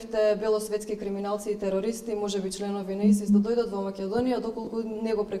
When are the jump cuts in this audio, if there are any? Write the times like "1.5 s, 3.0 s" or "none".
none